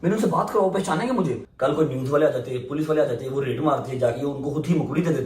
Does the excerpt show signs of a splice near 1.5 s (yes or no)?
yes